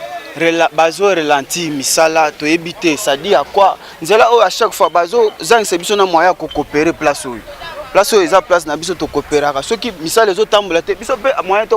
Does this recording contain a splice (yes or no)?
yes